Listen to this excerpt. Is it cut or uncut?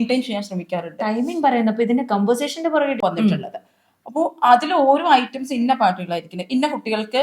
cut